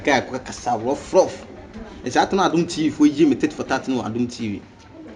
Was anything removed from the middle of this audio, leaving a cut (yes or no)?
no